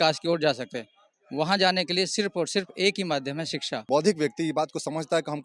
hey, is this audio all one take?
no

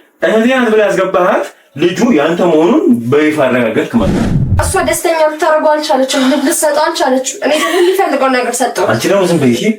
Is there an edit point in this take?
yes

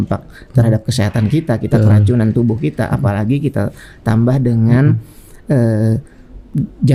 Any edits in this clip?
no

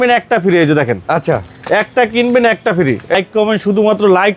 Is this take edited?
yes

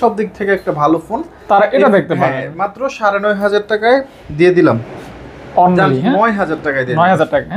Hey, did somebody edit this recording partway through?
no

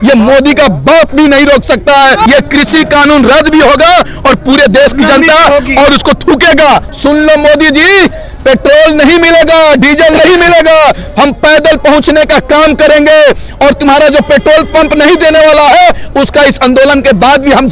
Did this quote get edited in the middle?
yes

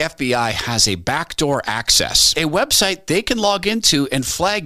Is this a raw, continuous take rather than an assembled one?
yes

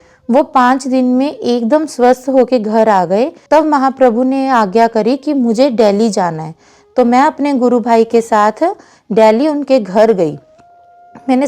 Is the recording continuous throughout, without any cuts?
yes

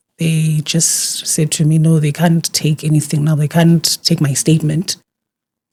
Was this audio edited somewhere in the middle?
no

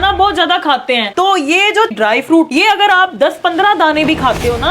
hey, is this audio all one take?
no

